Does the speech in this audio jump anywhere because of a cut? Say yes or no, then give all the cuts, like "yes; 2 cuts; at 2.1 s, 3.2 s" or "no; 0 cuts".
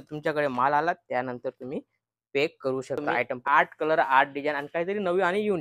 yes; 1 cut; at 3.4 s